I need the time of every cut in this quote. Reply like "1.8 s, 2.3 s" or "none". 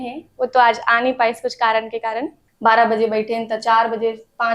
2.4 s